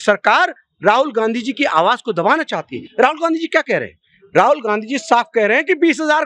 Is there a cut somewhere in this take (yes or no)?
no